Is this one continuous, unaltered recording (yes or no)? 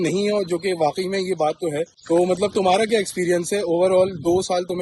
yes